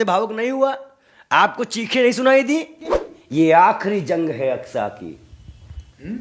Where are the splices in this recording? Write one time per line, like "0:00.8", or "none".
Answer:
0:03.1